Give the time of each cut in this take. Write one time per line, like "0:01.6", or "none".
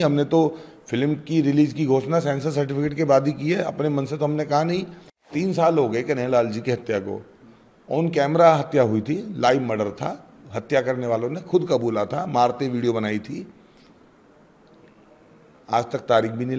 0:05.3